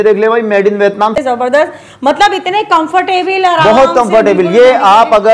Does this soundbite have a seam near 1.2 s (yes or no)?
yes